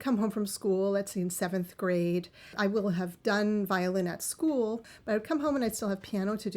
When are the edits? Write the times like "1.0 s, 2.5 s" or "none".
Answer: 4.9 s